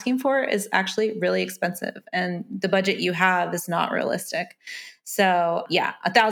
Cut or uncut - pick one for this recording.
uncut